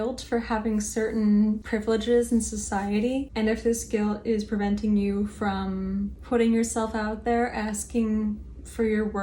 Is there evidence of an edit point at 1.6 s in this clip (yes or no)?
yes